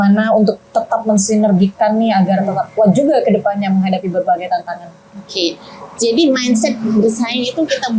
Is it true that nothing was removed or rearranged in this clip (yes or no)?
yes